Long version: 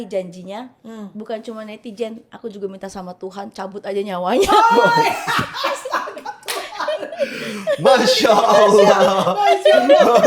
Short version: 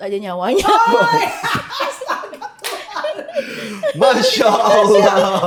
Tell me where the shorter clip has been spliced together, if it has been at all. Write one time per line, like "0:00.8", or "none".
none